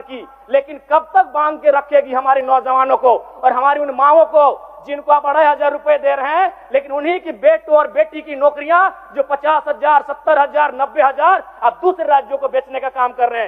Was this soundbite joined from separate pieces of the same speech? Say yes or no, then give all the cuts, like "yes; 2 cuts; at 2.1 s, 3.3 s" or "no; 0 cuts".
no; 0 cuts